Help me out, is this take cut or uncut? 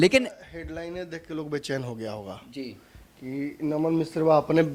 uncut